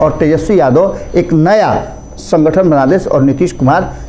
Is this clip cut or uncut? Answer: uncut